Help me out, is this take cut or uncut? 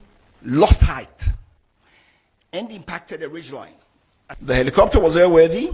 cut